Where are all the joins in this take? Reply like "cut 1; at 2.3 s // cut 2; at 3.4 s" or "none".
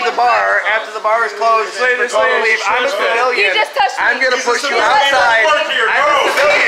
cut 1; at 1.7 s // cut 2; at 5.8 s